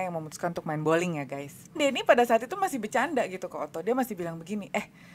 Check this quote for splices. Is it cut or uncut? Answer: cut